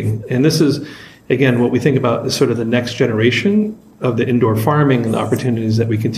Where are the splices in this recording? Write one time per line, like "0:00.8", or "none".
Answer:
none